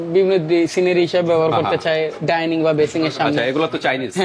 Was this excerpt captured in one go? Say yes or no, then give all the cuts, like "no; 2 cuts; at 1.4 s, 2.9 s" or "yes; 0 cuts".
yes; 0 cuts